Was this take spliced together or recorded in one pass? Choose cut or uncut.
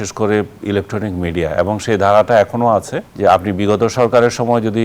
cut